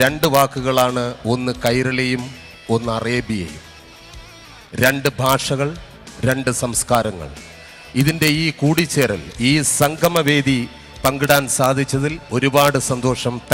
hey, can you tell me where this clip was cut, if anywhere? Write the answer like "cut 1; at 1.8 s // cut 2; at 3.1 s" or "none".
cut 1; at 3.7 s